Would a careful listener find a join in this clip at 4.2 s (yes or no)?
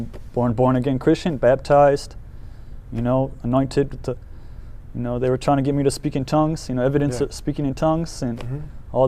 no